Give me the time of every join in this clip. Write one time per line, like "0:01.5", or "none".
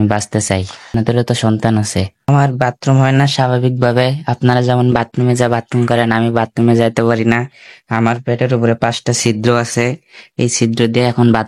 0:00.9
0:02.3